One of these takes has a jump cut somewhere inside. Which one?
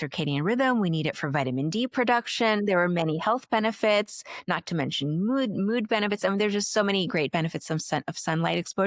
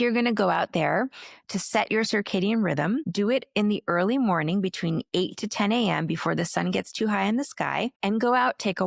second; 2 cuts; at 3.1 s, 7.9 s

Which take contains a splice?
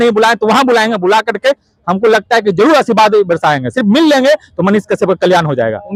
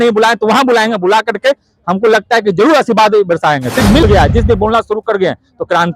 second; 1 cut; at 4.0 s

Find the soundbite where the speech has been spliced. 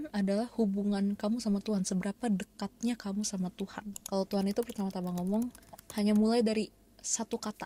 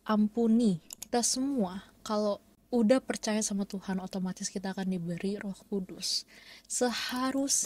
second; 2 cuts; at 0.9 s, 2.5 s

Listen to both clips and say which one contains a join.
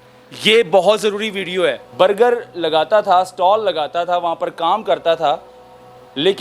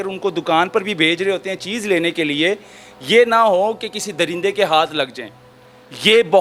first; 1 cut; at 1.8 s

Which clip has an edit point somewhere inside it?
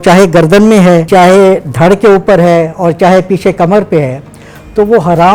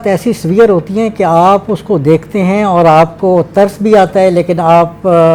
first; 1 cut; at 1.0 s

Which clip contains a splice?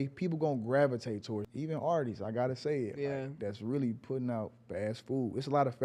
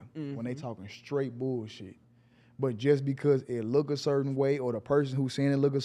first; 1 cut; at 1.5 s

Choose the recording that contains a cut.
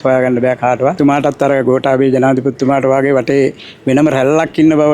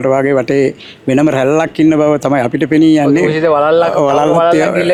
first; 1 cut; at 1.0 s

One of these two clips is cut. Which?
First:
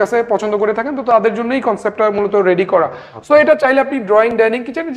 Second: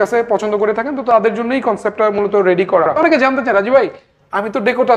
second; 1 cut; at 2.9 s

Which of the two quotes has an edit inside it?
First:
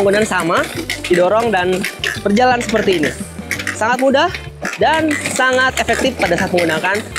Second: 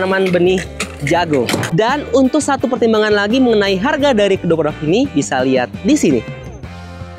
second; 1 cut; at 1.6 s

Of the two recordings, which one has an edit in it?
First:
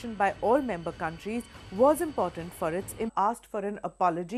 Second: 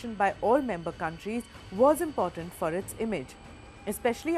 second; 1 cut; at 3.1 s

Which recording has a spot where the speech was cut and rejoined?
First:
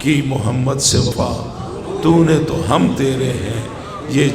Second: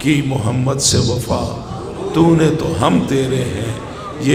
first; 1 cut; at 1.1 s

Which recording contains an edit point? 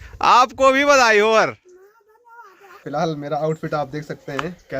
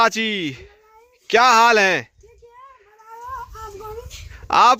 first; 1 cut; at 2.8 s

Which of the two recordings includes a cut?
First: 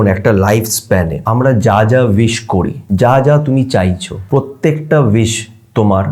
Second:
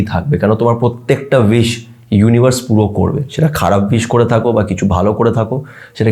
first; 3 cuts; at 1.2 s, 2.8 s, 4.1 s

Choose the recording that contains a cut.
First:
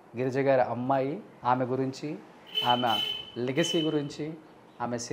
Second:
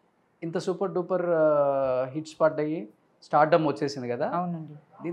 first; 1 cut; at 1.3 s

